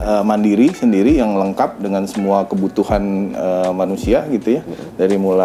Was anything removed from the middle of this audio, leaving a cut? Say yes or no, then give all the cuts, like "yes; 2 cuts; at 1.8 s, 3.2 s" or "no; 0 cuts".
no; 0 cuts